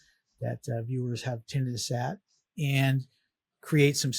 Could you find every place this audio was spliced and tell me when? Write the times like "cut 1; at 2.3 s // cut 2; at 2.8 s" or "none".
none